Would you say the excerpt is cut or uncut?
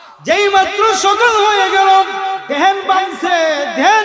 cut